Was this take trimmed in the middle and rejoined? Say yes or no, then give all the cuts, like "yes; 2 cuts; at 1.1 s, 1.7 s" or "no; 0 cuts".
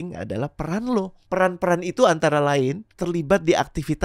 yes; 2 cuts; at 1.2 s, 2.9 s